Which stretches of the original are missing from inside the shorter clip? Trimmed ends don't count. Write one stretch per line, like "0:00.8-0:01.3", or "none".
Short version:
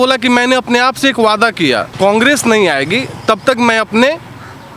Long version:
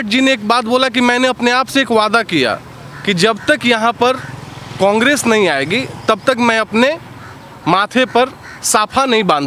0:02.6-0:04.7